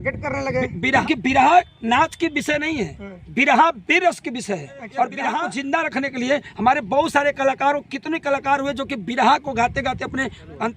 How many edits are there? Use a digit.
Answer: 2